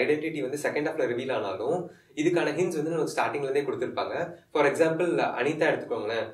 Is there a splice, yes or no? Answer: no